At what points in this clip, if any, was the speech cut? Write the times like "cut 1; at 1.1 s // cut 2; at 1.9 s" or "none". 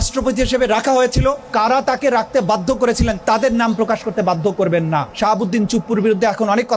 cut 1; at 1.4 s // cut 2; at 3.2 s // cut 3; at 5.1 s